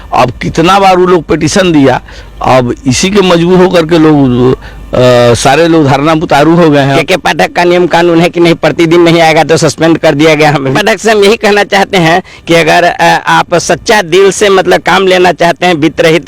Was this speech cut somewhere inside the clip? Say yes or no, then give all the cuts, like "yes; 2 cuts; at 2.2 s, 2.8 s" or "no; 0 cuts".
yes; 2 cuts; at 6.9 s, 10.8 s